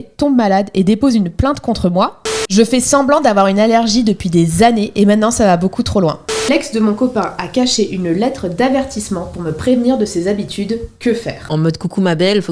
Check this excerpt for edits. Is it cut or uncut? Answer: cut